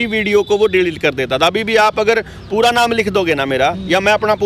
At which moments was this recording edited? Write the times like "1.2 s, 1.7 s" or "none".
none